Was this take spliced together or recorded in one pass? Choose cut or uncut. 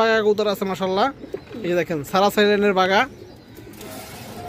uncut